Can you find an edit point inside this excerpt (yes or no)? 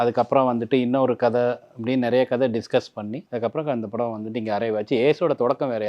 yes